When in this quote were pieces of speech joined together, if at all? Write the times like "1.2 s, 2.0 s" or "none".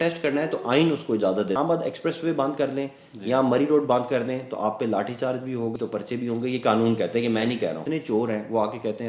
1.6 s, 5.7 s, 7.8 s

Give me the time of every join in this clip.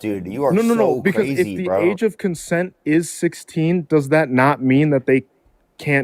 none

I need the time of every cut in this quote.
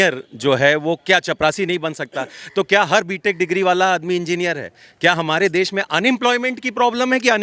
none

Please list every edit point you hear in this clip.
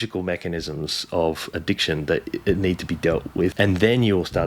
3.5 s

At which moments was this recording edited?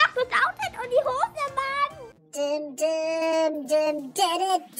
2.0 s

